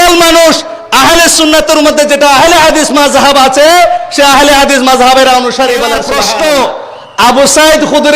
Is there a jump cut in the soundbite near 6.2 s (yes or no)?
yes